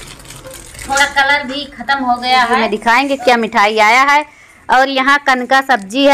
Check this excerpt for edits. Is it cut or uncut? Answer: cut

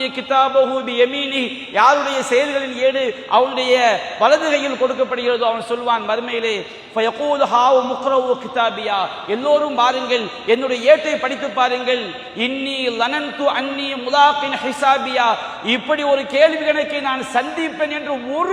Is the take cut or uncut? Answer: uncut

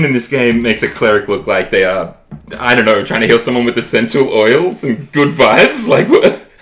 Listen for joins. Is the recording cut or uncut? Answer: uncut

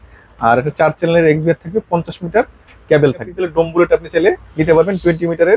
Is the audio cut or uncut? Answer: cut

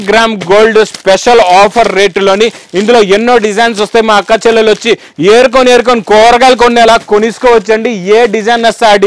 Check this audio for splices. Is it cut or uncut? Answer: uncut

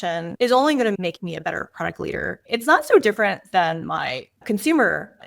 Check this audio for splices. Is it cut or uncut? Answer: cut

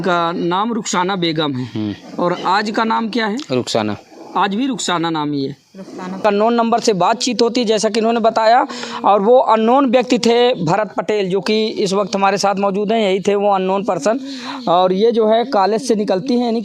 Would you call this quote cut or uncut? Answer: cut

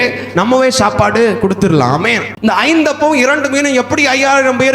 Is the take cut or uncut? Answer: cut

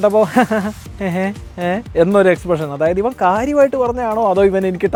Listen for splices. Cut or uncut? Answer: uncut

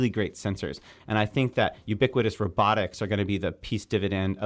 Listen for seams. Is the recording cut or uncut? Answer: cut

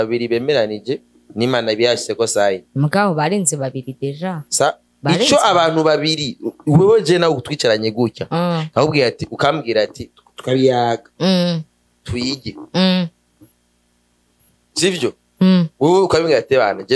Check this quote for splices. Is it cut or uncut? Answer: uncut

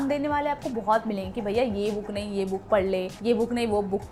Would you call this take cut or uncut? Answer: uncut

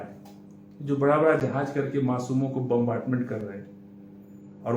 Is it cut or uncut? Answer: uncut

